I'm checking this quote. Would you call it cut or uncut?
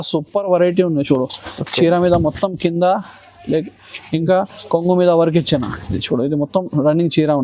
uncut